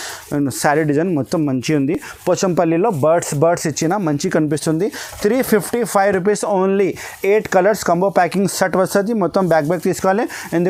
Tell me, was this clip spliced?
no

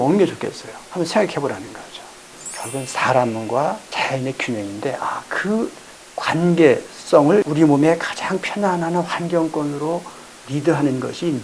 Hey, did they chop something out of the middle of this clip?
yes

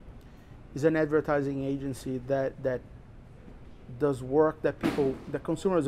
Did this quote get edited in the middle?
no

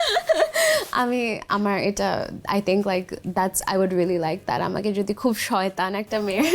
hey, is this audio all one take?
yes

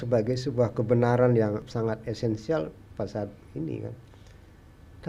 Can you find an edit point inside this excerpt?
yes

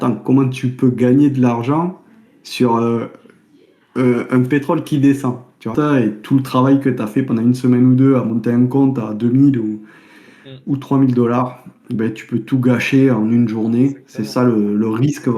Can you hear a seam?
yes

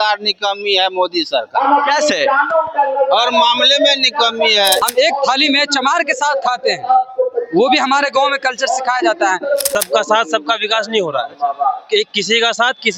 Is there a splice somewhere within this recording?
yes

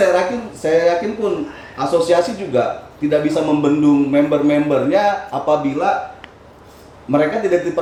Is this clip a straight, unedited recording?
yes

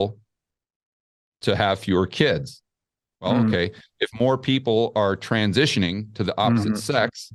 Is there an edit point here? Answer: no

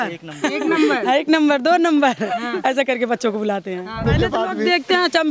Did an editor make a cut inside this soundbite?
yes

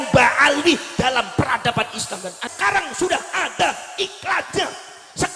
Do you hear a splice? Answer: yes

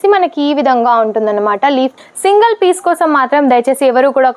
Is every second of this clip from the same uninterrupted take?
no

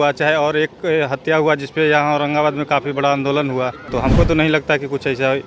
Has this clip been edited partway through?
yes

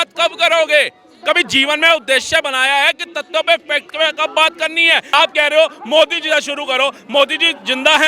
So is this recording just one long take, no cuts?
no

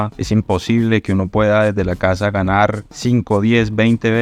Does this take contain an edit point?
no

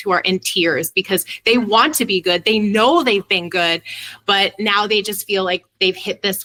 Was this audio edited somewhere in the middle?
no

